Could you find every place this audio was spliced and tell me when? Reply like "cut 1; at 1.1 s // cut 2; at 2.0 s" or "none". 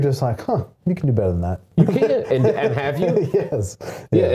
cut 1; at 1.6 s